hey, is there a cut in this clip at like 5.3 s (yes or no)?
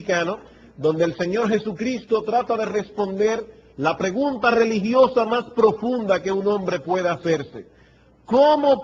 yes